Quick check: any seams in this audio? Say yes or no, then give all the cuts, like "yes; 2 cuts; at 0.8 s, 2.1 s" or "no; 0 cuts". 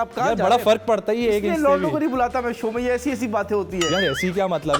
no; 0 cuts